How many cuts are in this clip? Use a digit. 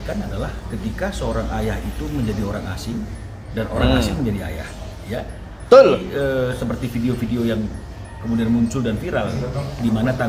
0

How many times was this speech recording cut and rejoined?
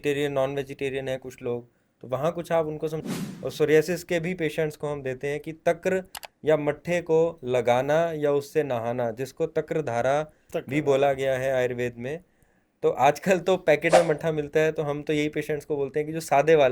1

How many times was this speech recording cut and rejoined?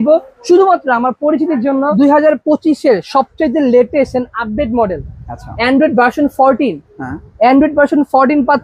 1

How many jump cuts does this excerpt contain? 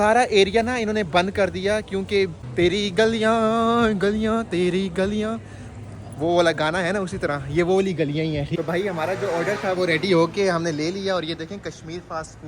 2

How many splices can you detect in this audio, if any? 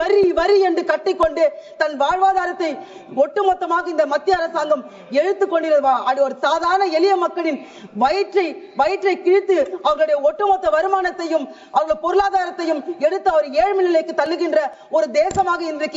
0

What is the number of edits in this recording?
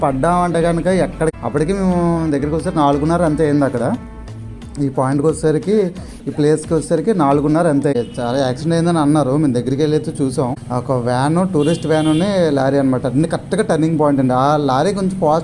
3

